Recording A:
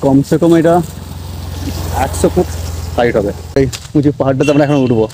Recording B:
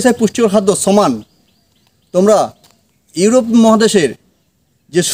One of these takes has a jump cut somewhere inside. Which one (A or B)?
A